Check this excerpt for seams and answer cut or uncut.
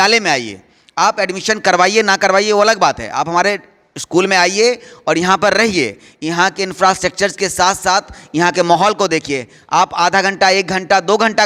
uncut